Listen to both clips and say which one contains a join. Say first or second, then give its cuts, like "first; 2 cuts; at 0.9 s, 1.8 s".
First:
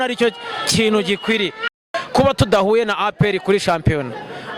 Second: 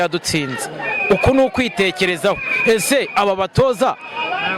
first; 1 cut; at 1.7 s